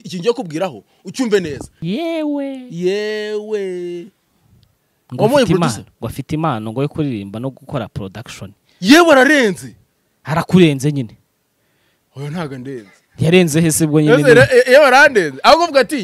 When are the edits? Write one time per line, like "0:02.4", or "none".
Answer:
0:01.7